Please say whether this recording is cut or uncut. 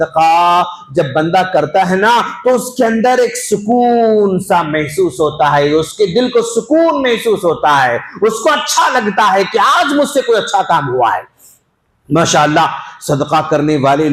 uncut